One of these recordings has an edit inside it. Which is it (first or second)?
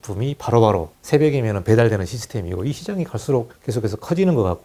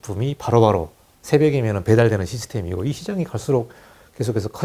first